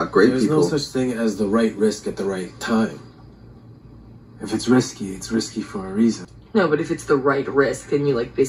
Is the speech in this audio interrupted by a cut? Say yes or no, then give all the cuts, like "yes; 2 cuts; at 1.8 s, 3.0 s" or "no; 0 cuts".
yes; 1 cut; at 6.3 s